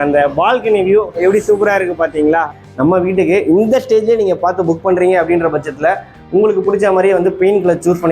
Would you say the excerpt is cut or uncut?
cut